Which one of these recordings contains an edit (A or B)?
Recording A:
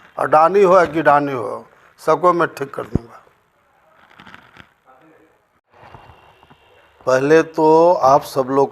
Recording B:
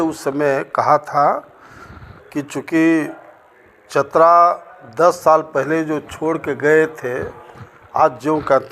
A